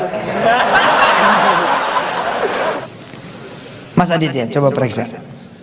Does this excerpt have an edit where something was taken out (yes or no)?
yes